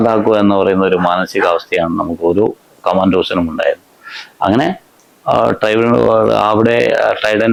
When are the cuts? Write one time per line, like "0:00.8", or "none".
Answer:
none